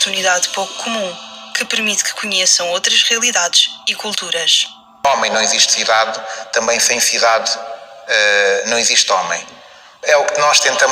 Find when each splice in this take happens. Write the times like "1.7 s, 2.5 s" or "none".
5.0 s